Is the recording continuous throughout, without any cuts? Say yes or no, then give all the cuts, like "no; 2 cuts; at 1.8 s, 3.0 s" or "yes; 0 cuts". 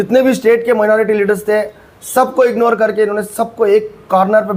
yes; 0 cuts